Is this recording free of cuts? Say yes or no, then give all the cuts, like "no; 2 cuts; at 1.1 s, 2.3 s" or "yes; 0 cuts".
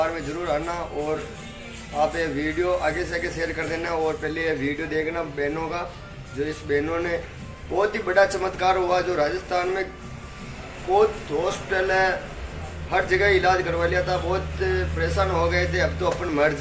yes; 0 cuts